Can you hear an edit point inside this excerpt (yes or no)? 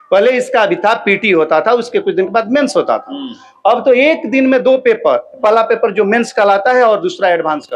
no